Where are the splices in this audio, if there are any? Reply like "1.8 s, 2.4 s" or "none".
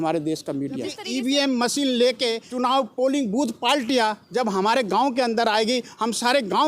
1.0 s, 2.4 s